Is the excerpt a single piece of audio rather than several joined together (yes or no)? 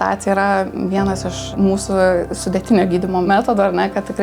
no